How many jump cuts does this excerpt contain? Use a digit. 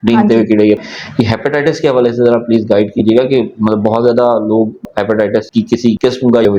2